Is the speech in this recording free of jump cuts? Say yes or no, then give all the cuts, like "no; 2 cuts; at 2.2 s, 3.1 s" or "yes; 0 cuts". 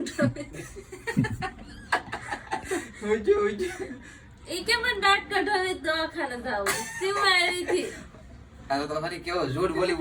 yes; 0 cuts